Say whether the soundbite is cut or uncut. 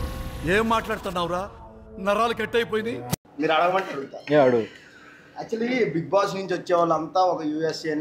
cut